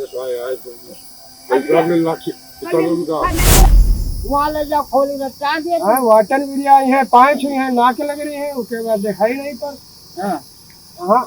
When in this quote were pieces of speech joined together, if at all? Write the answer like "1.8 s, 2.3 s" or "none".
3.6 s